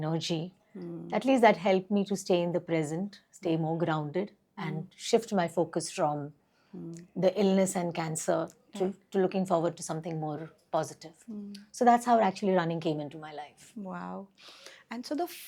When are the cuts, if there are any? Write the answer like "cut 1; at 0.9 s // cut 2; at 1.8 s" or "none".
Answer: none